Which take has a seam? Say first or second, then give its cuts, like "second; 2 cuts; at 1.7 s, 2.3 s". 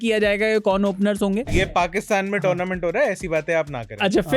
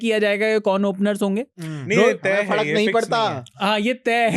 first; 1 cut; at 1.7 s